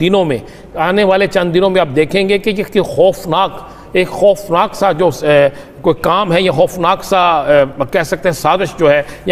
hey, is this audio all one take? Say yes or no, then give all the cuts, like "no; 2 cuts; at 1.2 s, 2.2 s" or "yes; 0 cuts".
yes; 0 cuts